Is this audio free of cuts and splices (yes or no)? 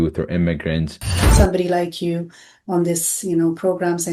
no